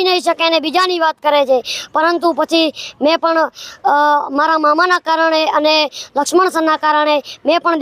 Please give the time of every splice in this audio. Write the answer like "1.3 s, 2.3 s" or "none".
none